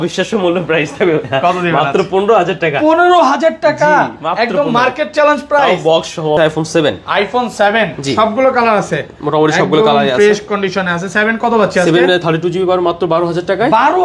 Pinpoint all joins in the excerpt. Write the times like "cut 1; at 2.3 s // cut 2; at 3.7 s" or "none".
cut 1; at 6.4 s